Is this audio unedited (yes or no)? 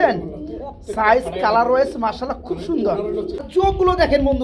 no